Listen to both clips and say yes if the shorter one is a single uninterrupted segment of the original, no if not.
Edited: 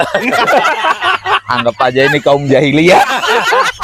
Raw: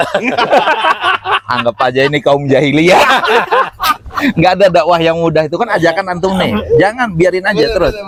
yes